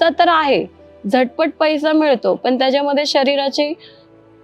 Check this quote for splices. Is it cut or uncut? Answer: uncut